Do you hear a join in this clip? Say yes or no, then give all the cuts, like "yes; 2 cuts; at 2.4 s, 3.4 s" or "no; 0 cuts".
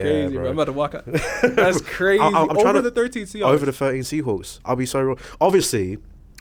no; 0 cuts